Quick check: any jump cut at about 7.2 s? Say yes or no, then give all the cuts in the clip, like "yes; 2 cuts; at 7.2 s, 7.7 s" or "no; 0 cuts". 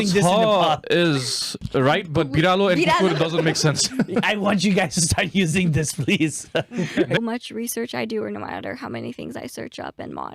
yes; 1 cut; at 7.2 s